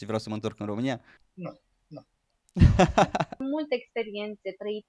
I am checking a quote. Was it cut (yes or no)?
yes